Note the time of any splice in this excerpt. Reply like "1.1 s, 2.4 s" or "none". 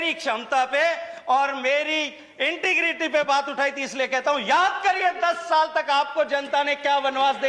none